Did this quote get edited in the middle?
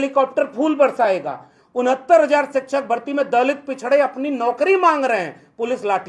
no; 0 cuts

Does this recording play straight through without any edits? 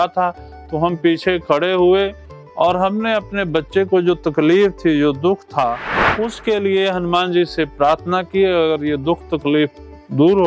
yes; 0 cuts

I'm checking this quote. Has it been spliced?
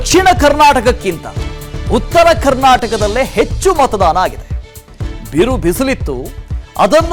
no; 0 cuts

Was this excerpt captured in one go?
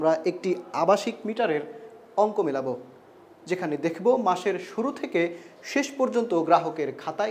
yes; 0 cuts

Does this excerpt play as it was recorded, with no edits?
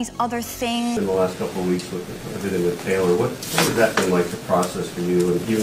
no; 1 cut; at 1.0 s

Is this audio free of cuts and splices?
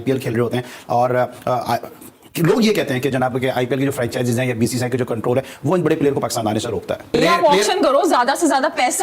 no; 1 cut; at 7.1 s

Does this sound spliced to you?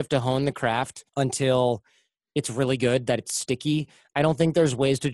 yes; 1 cut; at 1.0 s

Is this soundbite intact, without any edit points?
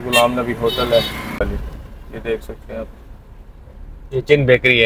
no; 1 cut; at 1.5 s

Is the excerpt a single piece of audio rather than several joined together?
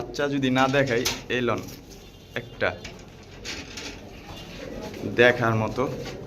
yes; 0 cuts

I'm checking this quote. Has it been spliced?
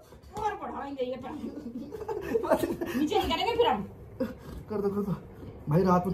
no; 0 cuts

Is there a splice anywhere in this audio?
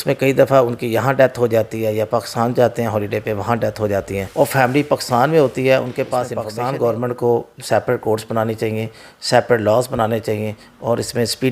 yes; 1 cut; at 6.4 s

